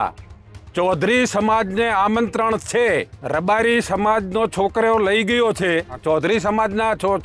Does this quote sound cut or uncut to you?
cut